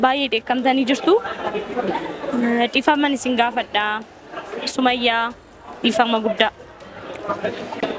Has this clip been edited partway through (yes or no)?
no